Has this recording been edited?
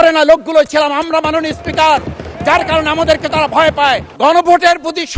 yes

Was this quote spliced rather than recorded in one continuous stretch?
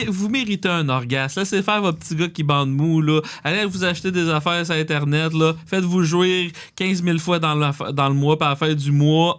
no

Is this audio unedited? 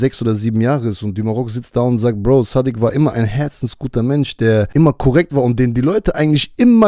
no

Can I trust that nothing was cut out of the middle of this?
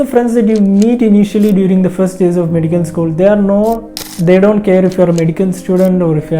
no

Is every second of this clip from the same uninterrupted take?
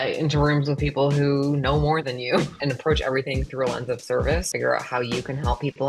no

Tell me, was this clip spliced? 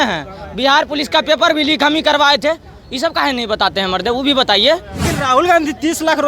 yes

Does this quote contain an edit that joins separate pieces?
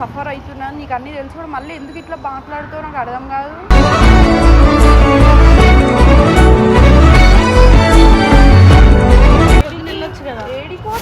yes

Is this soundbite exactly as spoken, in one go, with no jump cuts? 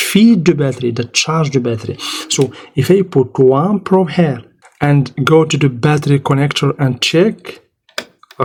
yes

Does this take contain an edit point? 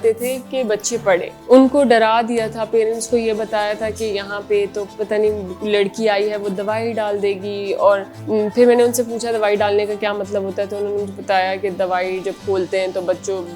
yes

